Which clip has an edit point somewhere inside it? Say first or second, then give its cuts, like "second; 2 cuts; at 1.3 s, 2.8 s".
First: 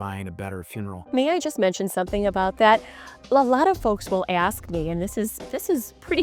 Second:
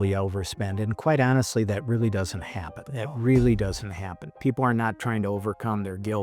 first; 1 cut; at 3.2 s